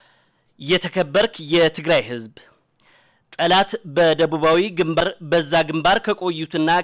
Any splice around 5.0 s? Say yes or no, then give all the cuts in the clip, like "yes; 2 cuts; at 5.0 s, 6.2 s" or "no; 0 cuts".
yes; 1 cut; at 5.0 s